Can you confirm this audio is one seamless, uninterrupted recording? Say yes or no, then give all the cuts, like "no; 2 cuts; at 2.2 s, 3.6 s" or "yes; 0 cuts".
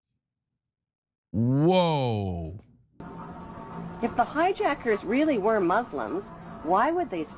no; 1 cut; at 3.0 s